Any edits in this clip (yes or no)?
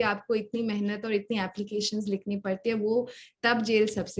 no